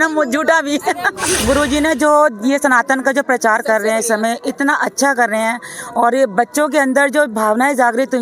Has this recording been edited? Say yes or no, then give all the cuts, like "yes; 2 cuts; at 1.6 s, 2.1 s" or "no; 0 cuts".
yes; 1 cut; at 1.3 s